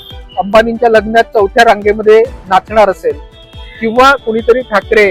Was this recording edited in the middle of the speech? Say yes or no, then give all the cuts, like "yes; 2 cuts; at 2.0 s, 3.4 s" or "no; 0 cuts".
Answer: no; 0 cuts